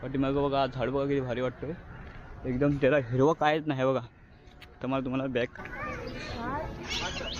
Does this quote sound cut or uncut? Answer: cut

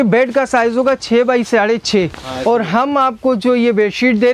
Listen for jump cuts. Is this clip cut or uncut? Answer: uncut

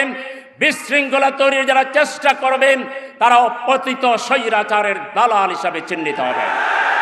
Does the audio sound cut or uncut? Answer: uncut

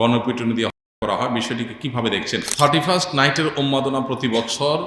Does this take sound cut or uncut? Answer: cut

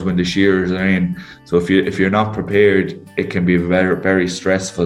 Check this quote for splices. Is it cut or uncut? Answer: uncut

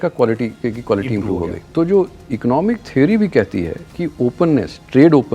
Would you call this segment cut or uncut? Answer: cut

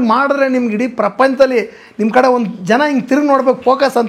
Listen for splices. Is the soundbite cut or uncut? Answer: uncut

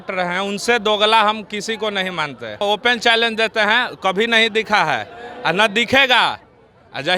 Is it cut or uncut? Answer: cut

